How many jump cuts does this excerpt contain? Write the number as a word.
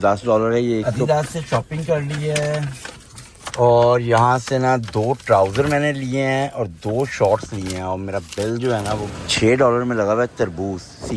two